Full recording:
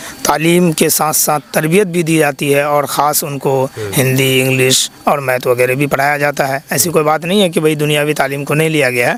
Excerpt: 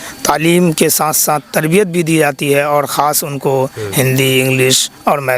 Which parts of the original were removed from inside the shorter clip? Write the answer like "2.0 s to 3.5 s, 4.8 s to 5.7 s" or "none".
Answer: none

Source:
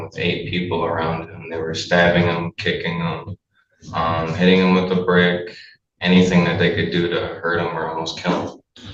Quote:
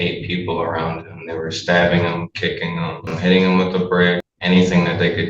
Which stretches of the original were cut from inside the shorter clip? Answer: 3.3 s to 4.3 s, 5.5 s to 5.9 s

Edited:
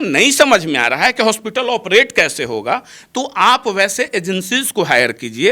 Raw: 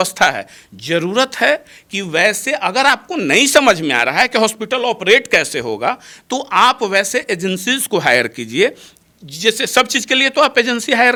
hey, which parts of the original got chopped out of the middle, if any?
none

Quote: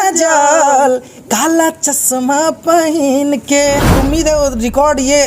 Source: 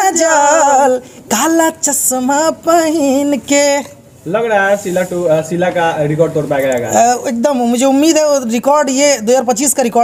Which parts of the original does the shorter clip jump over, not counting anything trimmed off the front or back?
4.0 s to 7.9 s

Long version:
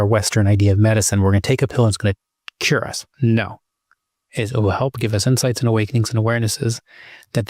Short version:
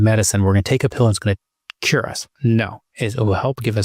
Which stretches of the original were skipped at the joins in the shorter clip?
3.6 s to 4.2 s

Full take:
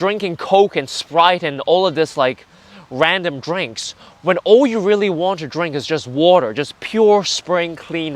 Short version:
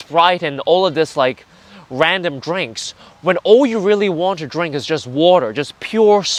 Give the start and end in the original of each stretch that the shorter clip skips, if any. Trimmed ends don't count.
none

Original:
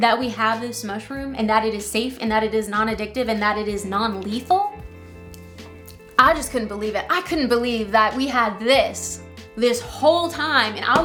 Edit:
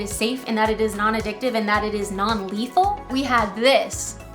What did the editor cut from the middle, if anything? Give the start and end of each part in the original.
4.8 s to 8.1 s

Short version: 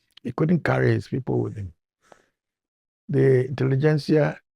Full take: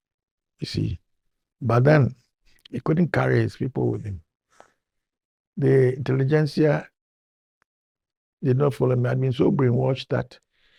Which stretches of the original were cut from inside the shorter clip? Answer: none

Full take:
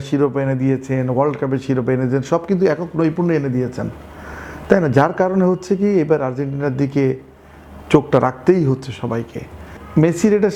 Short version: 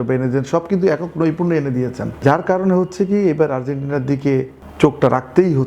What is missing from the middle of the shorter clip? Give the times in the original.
4.0 s to 4.9 s, 7.3 s to 7.7 s

